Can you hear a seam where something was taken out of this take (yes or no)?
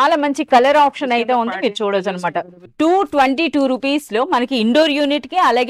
yes